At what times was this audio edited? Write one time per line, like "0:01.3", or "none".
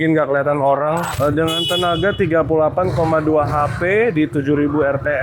0:01.1